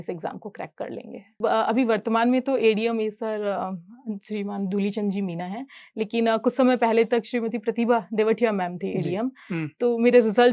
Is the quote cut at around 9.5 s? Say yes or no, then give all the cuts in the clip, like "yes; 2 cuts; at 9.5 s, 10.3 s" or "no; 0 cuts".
no; 1 cut; at 1.4 s